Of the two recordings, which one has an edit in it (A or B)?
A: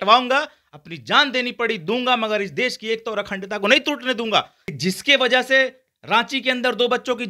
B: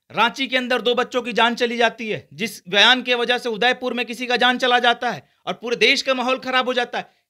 A